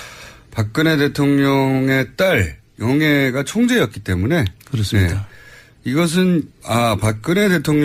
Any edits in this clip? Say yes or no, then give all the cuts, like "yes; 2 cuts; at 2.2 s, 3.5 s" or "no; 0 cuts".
no; 0 cuts